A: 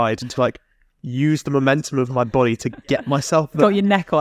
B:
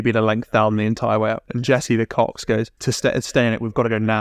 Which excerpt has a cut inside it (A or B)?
B